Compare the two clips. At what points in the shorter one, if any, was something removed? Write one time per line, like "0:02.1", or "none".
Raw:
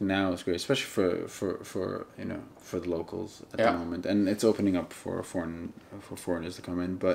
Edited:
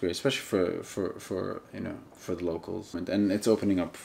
0:02.9